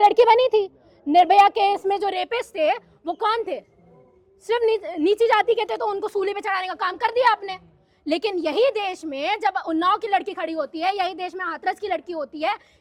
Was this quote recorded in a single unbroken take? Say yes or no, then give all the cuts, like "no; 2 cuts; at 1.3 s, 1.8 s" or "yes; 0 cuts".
yes; 0 cuts